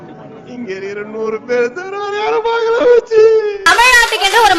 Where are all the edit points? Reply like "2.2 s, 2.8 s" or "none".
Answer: 3.7 s